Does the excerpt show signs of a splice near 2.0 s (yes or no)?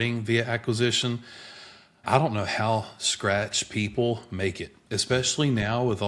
yes